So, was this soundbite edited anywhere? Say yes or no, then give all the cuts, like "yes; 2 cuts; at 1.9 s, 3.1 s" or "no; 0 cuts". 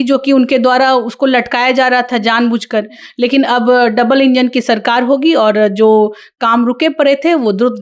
no; 0 cuts